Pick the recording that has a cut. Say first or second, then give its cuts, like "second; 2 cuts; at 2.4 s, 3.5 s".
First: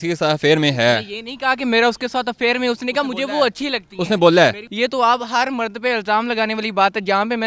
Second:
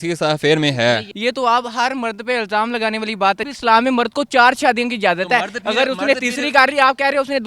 second; 2 cuts; at 1.1 s, 3.4 s